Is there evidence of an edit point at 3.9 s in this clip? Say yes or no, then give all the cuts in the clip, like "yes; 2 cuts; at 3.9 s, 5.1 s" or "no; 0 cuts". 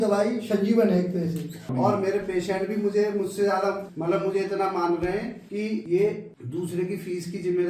yes; 4 cuts; at 1.7 s, 3.9 s, 5.7 s, 6.3 s